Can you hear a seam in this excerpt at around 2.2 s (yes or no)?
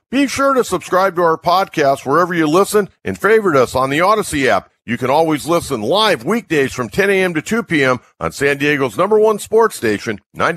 no